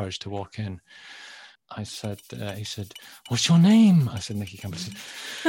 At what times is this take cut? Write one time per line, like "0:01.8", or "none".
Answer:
0:01.5